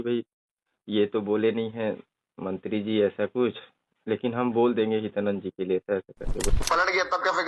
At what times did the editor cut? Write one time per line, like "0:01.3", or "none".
0:06.5